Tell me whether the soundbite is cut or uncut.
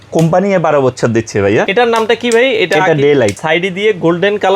cut